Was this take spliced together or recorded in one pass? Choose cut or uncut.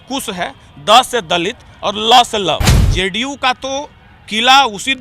cut